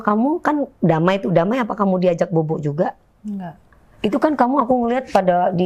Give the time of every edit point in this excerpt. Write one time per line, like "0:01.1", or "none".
0:03.8